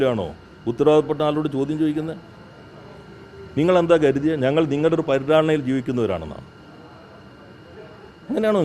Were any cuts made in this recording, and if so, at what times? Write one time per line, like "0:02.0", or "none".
none